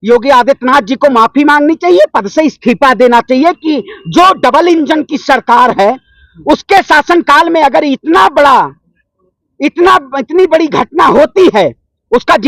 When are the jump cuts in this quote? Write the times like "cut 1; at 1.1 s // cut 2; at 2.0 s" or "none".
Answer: none